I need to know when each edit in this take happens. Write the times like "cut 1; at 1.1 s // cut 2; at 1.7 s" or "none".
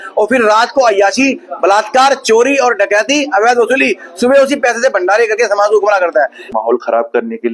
cut 1; at 6.5 s